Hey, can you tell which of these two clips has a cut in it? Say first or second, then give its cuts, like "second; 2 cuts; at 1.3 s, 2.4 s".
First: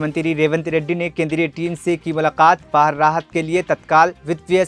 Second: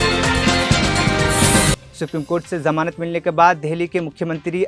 second; 1 cut; at 1.8 s